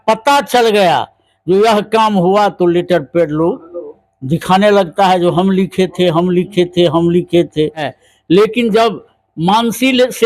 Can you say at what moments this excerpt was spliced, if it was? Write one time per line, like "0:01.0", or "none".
0:07.9